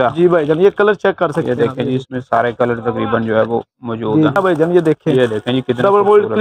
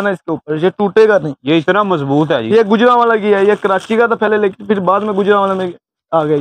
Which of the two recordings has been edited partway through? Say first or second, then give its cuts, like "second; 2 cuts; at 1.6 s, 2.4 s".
first; 1 cut; at 4.3 s